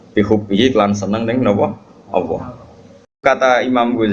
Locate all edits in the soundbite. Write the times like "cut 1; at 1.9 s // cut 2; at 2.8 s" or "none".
cut 1; at 3.2 s